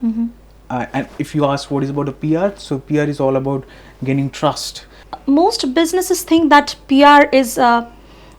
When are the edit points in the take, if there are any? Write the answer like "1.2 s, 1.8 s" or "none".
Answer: 5.0 s